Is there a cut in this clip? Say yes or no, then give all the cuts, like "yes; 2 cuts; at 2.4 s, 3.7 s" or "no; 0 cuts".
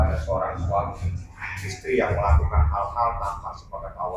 no; 0 cuts